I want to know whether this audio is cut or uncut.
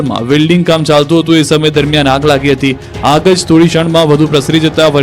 cut